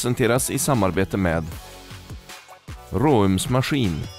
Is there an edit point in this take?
no; 0 cuts

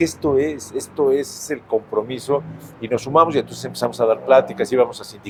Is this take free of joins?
yes; 0 cuts

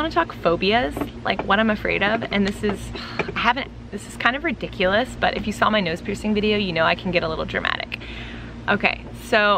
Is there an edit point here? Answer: no; 0 cuts

